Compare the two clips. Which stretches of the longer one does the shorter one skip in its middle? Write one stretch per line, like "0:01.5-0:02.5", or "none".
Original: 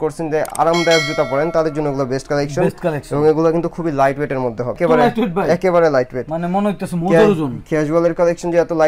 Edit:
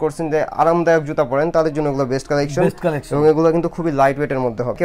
none